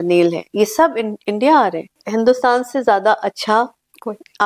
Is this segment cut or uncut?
cut